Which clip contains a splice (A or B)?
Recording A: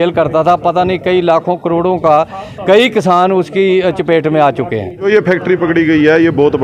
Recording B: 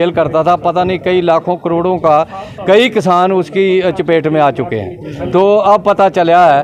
A